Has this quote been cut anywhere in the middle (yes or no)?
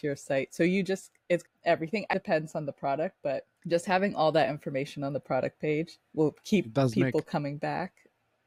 no